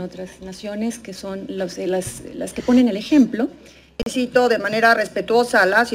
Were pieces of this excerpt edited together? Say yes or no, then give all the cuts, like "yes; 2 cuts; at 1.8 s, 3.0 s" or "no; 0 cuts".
yes; 1 cut; at 4.1 s